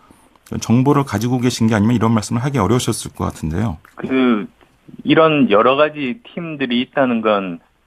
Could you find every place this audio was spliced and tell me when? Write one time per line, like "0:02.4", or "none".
0:03.9